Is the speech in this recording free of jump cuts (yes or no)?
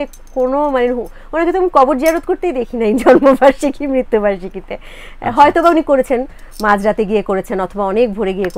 yes